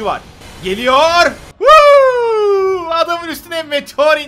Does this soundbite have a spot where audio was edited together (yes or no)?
no